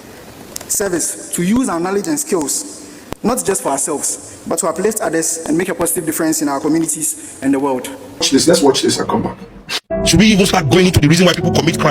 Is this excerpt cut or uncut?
cut